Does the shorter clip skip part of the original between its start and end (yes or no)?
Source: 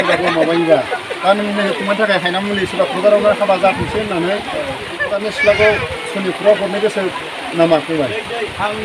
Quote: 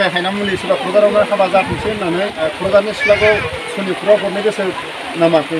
yes